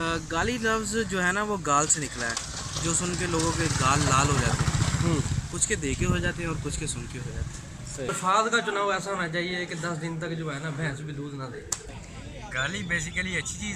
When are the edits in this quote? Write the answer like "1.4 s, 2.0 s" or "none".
8.1 s, 11.8 s